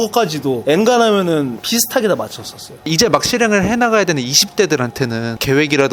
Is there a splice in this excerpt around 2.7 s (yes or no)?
yes